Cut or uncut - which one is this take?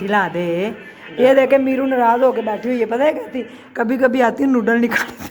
uncut